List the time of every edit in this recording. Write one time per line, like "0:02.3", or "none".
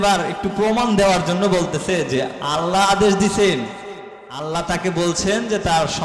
none